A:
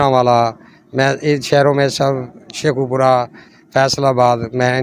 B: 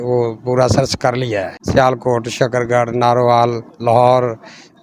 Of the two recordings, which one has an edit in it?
B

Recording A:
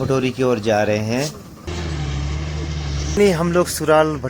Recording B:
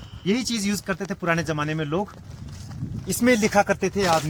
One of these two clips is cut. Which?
A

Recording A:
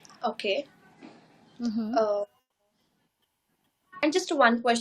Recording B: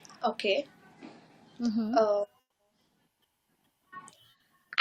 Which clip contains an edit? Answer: A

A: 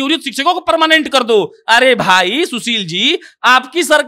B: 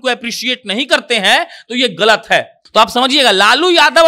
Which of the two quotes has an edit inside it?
B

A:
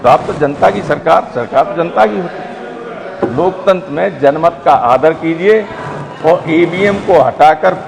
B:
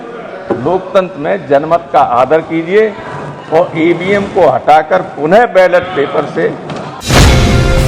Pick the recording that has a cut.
B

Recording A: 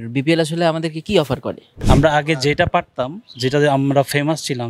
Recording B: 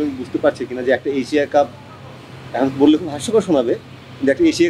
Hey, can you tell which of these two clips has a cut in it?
A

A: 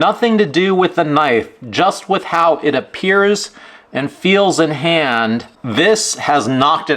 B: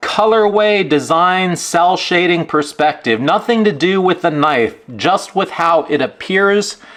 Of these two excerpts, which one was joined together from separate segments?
A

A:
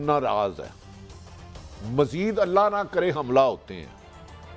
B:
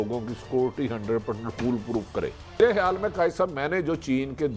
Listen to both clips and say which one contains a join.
B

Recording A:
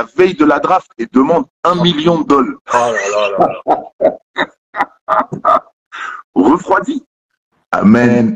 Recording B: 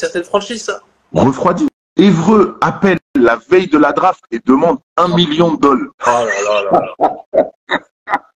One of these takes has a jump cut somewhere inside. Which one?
B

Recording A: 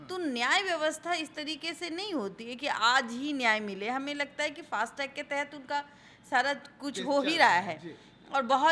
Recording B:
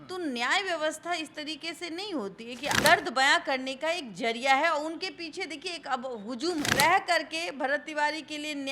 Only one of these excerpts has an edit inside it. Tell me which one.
B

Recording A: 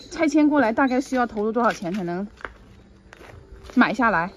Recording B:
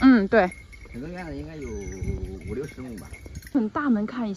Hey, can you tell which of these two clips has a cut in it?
B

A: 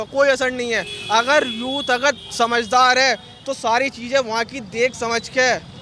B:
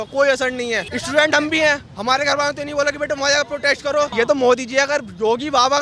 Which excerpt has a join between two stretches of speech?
B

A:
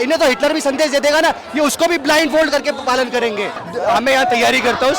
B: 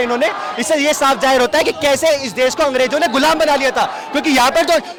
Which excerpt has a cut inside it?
A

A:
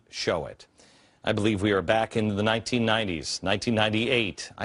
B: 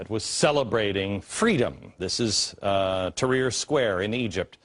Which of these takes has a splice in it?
A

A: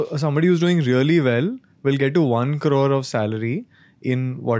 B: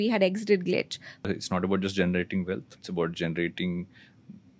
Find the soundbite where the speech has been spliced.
B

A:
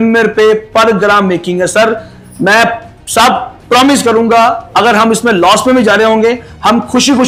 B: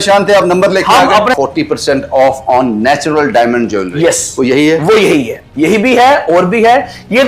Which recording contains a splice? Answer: B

